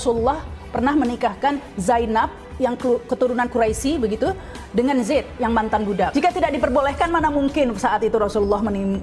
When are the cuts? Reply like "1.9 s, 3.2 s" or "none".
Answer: 6.1 s